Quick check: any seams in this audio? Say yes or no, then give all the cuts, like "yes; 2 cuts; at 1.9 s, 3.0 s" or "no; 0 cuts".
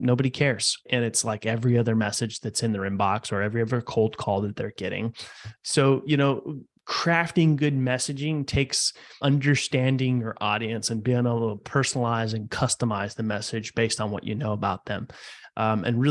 yes; 3 cuts; at 0.9 s, 5.5 s, 9.2 s